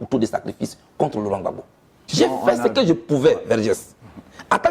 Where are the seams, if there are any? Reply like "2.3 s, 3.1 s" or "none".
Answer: 2.0 s